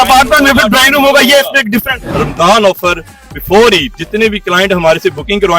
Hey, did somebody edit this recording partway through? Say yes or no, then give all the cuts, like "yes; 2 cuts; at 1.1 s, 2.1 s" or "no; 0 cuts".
yes; 2 cuts; at 2.2 s, 4.0 s